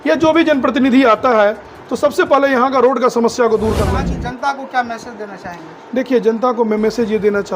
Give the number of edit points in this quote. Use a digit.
1